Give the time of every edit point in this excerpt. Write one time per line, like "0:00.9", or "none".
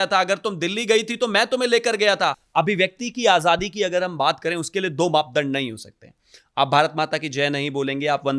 0:02.4